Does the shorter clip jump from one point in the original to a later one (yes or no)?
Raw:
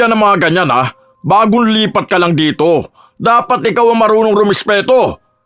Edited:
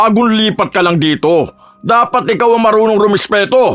no